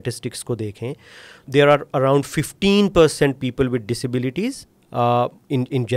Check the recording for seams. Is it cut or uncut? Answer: cut